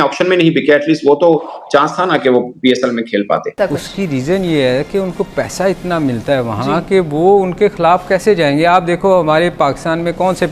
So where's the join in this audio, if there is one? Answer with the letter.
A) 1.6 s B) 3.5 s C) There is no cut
B